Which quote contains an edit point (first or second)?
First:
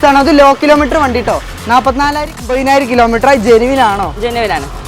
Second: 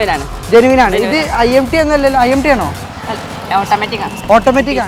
first